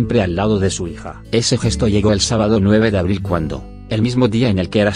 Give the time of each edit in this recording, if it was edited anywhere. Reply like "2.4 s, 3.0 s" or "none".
none